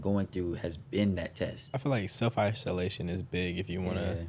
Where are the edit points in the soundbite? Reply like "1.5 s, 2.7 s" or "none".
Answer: 1.7 s